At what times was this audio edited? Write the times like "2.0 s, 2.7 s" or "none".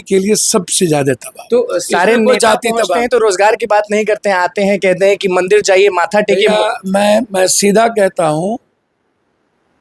none